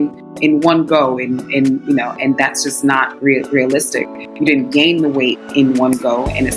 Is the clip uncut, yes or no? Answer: yes